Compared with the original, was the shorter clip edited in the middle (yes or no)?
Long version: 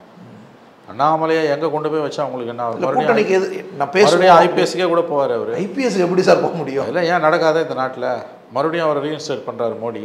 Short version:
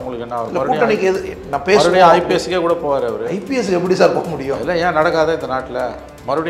no